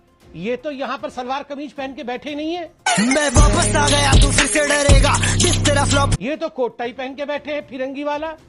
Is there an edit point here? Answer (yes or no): no